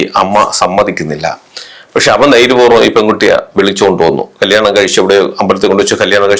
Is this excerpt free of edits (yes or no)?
yes